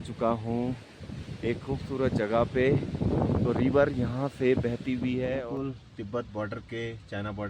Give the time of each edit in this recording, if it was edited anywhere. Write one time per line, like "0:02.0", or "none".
0:05.4